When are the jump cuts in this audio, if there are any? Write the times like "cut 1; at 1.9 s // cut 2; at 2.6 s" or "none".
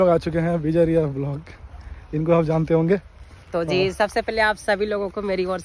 none

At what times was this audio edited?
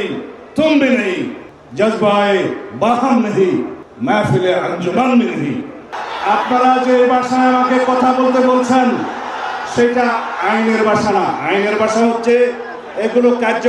cut 1; at 3.8 s // cut 2; at 5.8 s

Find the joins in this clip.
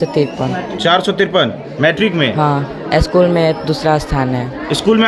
none

